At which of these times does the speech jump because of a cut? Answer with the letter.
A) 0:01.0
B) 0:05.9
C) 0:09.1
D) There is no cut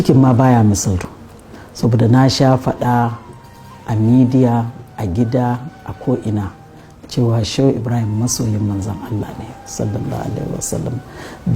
A